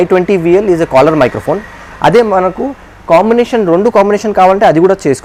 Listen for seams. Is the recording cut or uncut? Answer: uncut